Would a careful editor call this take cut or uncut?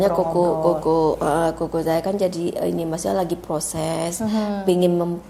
uncut